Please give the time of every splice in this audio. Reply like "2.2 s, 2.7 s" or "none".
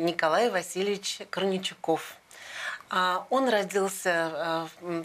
none

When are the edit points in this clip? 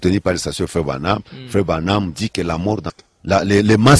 2.9 s

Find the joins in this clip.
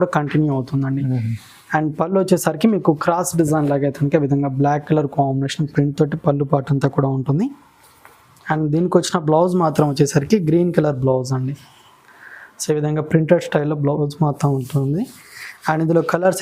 none

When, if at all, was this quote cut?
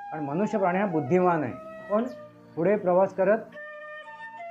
1.9 s

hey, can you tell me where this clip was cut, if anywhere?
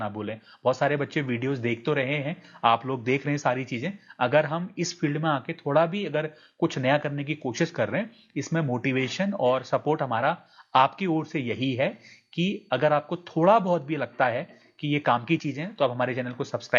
none

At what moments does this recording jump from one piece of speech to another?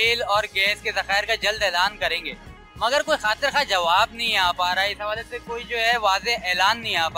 none

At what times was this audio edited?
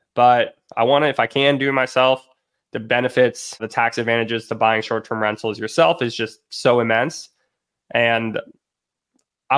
3.6 s

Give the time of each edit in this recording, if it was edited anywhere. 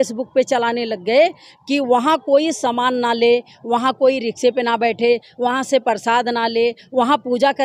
none

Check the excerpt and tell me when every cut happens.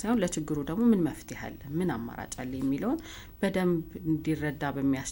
none

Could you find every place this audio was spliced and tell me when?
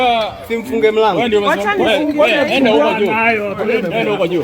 none

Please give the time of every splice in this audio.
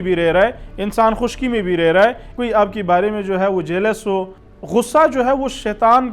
2.3 s, 4.4 s

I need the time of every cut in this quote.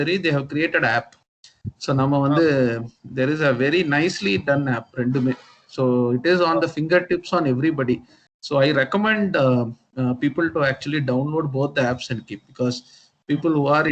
none

